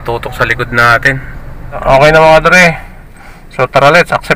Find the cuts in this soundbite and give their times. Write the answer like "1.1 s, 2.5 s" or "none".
1.7 s

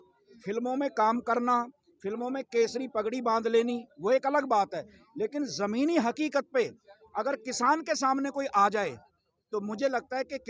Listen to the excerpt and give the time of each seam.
none

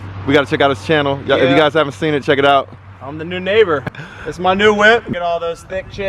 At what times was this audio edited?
3.9 s, 5.1 s

